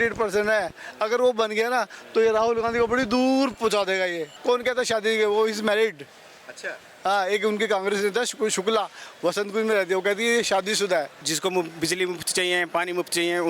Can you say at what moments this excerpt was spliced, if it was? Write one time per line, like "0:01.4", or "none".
0:04.3
0:11.2